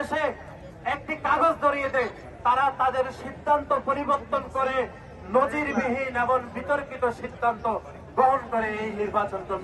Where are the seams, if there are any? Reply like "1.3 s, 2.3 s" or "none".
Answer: none